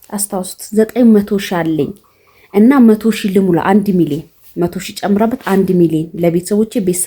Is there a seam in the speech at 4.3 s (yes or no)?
no